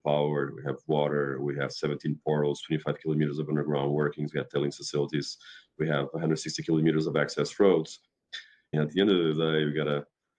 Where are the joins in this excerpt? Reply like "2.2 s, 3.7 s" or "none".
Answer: 8.6 s